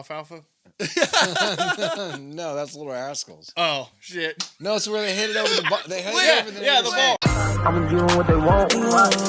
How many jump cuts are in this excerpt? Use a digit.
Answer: 1